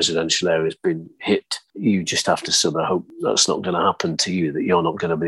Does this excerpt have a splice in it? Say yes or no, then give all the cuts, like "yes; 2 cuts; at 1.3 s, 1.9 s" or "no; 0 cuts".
yes; 2 cuts; at 1.7 s, 3.1 s